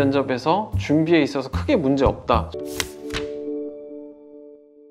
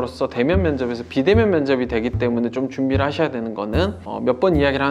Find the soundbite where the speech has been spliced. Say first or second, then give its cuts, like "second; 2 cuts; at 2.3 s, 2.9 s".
first; 1 cut; at 2.5 s